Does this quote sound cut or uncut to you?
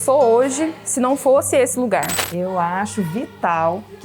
cut